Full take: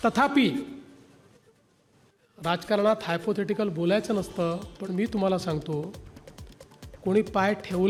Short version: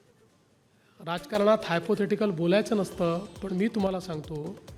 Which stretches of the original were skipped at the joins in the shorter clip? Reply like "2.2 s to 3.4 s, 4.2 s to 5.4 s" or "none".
none